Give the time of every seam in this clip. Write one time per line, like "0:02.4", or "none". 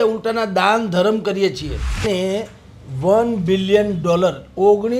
0:02.0